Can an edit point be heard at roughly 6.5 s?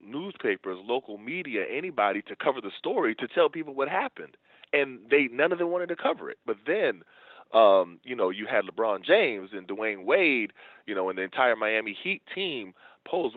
yes; 1 cut; at 6.5 s

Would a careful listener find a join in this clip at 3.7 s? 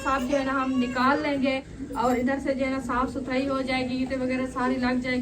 no; 1 cut; at 1.8 s

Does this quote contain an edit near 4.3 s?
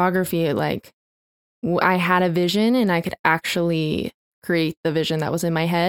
yes; 1 cut; at 4.3 s

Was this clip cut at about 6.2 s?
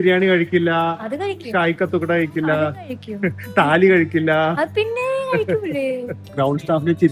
yes; 1 cut; at 6.2 s

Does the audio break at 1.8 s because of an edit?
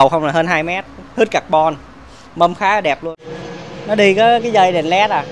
no; 1 cut; at 3.1 s

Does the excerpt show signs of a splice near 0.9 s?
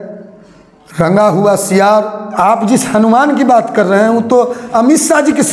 no; 1 cut; at 2.2 s

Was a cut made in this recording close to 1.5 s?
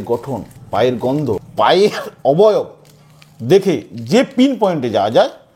yes; 1 cut; at 1.5 s

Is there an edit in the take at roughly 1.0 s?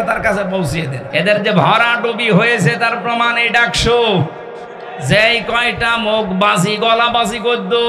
yes; 1 cut; at 1.0 s

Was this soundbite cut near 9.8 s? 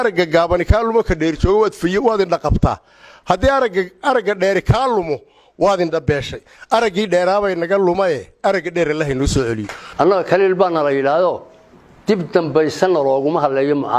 yes; 1 cut; at 9.8 s

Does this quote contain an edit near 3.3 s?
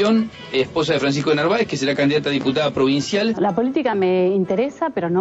yes; 1 cut; at 3.3 s

